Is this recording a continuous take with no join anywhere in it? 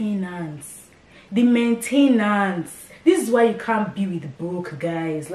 yes; 0 cuts

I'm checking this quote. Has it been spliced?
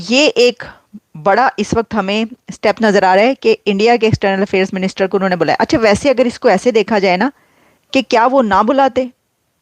no; 0 cuts

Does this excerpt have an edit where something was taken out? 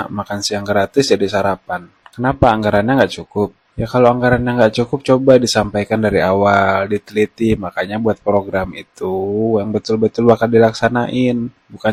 no; 0 cuts

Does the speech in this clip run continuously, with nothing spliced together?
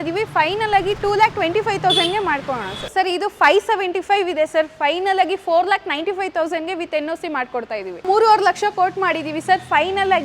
no; 2 cuts; at 2.8 s, 8.0 s

